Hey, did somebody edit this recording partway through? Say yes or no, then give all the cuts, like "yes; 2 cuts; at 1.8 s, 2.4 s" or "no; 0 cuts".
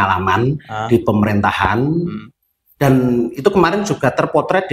no; 0 cuts